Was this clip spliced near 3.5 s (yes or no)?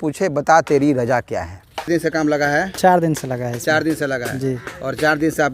no